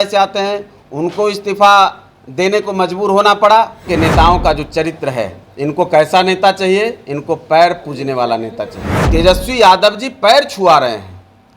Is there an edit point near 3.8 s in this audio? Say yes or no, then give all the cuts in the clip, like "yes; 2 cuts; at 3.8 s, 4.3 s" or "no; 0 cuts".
yes; 2 cuts; at 3.8 s, 8.9 s